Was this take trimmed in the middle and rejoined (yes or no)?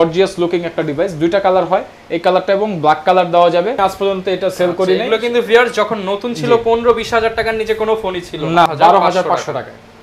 yes